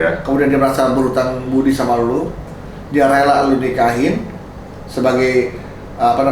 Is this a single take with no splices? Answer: yes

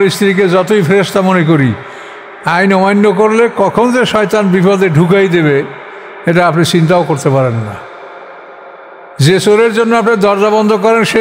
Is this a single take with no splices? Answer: yes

